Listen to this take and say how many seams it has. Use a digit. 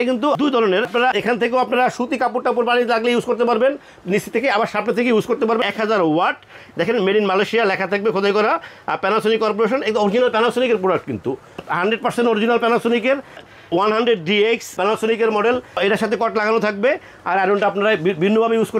3